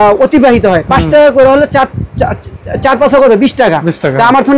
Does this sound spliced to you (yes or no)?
no